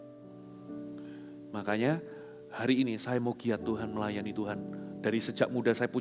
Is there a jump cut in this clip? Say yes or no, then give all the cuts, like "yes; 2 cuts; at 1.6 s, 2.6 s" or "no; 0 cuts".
no; 0 cuts